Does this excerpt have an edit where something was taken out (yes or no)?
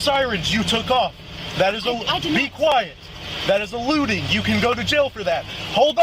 no